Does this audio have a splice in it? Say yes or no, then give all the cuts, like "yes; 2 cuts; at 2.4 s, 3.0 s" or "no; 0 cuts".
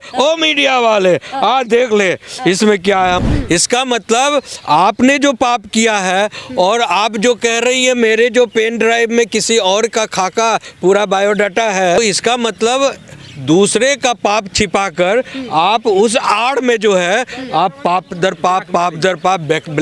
yes; 2 cuts; at 3.2 s, 12.0 s